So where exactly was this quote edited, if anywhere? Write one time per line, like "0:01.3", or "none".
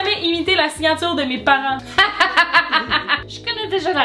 none